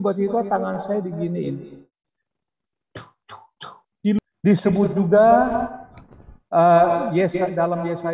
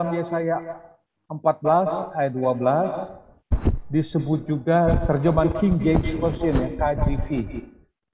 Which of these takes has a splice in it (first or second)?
first